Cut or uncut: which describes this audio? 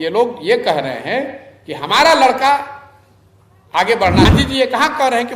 cut